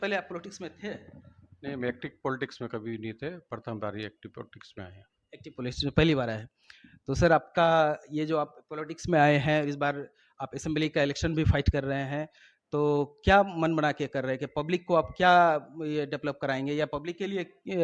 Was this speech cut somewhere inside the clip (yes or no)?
no